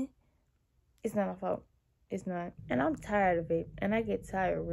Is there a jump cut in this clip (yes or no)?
yes